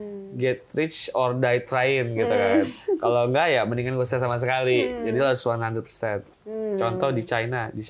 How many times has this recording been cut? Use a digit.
1